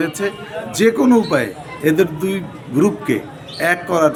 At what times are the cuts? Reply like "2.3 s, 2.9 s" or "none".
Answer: none